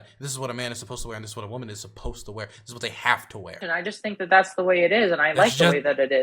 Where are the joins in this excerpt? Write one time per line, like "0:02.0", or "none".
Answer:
0:03.6